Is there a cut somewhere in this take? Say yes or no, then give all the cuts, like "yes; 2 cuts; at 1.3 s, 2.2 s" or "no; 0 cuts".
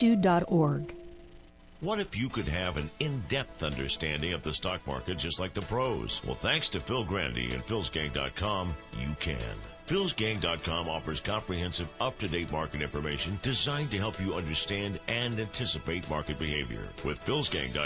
yes; 1 cut; at 1.5 s